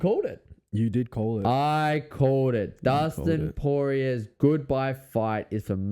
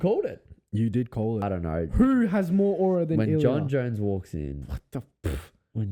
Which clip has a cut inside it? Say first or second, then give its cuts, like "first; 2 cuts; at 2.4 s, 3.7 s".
second; 1 cut; at 1.4 s